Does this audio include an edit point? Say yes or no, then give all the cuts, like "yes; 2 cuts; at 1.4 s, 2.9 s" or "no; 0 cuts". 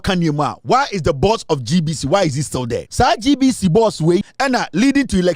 yes; 2 cuts; at 2.8 s, 4.3 s